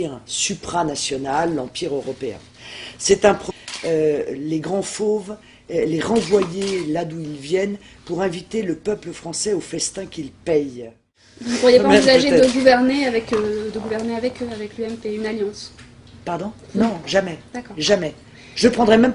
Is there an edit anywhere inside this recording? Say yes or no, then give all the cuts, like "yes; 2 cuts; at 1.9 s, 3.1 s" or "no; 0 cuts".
no; 0 cuts